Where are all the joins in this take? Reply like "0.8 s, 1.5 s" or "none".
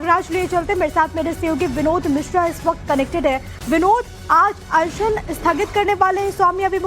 4.1 s

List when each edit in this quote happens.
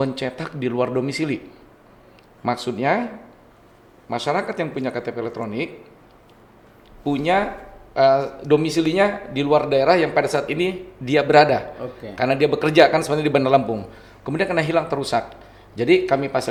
none

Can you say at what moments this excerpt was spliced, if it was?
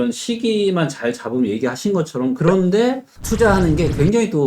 2.4 s

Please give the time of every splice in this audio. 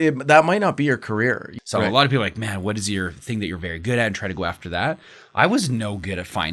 1.5 s

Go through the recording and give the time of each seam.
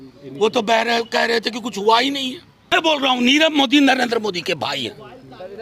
2.7 s

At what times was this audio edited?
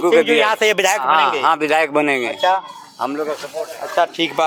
none

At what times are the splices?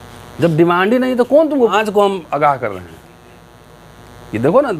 1.7 s

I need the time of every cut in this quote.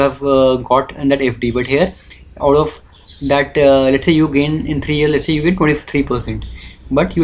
none

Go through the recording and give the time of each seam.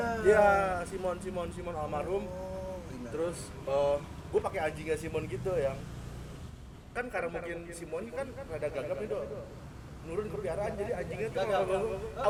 none

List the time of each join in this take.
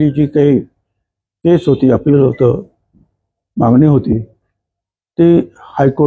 none

